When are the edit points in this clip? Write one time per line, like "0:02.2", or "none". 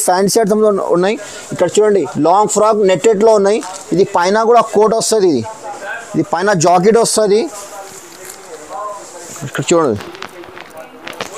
none